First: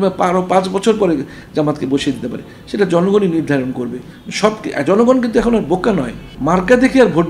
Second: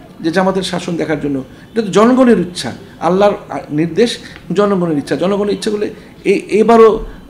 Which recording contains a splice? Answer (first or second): first